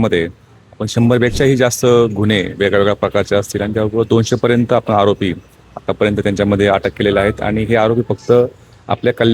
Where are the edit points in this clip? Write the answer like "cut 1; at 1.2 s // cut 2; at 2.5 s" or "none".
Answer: none